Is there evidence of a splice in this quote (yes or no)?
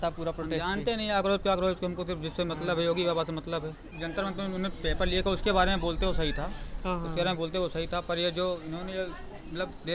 yes